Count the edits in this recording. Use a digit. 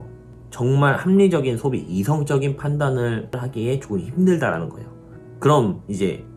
1